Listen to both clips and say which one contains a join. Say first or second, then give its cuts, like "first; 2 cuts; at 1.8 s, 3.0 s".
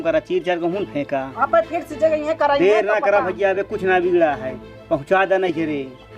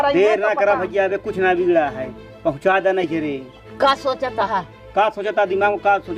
first; 1 cut; at 1.3 s